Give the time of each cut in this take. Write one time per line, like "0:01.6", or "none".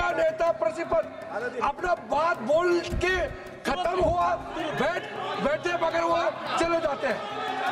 none